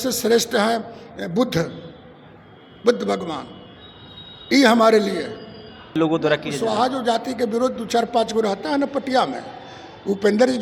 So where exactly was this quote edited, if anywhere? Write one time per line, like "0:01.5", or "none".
0:06.0